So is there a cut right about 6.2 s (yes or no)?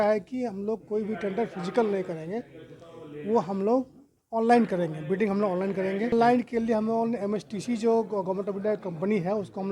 yes